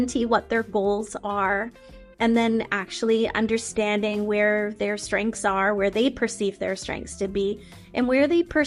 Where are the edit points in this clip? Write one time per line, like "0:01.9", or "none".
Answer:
none

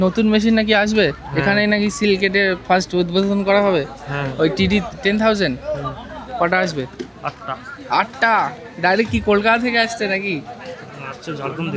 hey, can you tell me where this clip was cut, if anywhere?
none

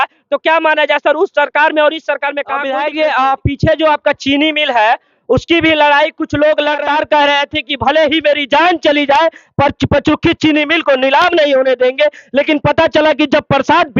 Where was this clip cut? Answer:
0:02.6
0:06.8

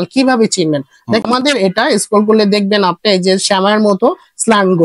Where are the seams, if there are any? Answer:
0:01.2

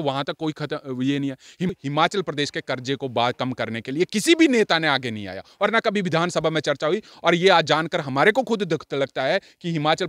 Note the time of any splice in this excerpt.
0:01.7

